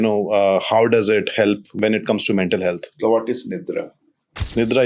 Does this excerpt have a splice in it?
yes; 2 cuts; at 1.7 s, 3.0 s

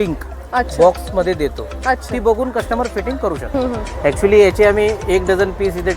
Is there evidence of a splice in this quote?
yes; 1 cut; at 3.4 s

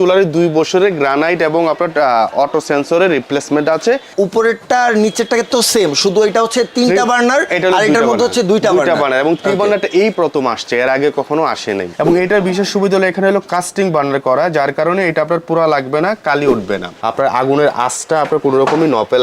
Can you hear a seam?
yes; 3 cuts; at 4.1 s, 11.9 s, 16.9 s

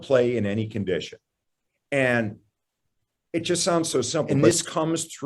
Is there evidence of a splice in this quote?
yes; 1 cut; at 4.3 s

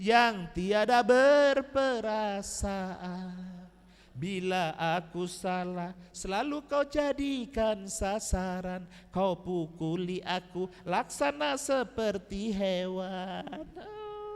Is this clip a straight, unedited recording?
yes; 0 cuts

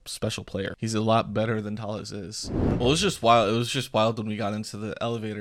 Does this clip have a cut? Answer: yes; 2 cuts; at 0.8 s, 2.7 s

